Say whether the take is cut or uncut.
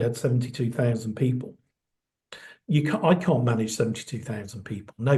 uncut